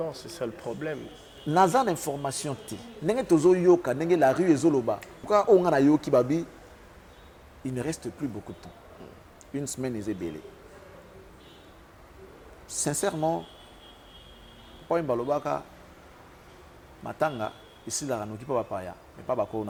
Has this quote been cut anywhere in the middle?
no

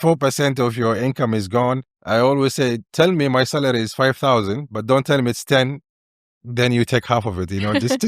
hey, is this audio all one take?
no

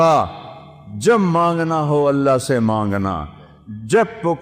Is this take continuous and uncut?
yes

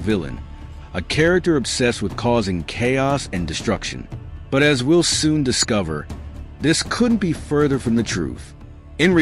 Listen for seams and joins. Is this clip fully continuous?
yes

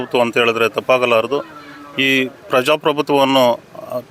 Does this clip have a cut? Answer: no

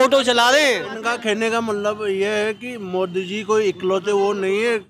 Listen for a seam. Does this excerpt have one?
yes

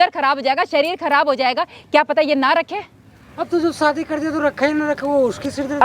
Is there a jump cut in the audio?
no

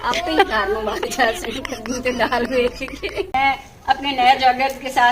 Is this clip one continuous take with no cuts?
no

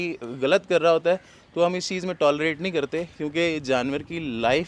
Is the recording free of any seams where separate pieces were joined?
yes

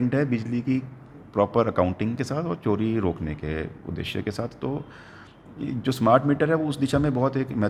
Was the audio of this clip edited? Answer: no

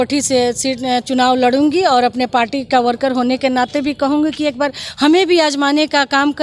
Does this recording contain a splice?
no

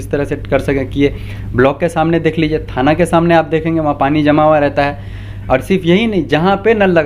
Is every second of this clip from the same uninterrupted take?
yes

